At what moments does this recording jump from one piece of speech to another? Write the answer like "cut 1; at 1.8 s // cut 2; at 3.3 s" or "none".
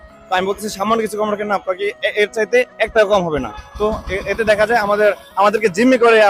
none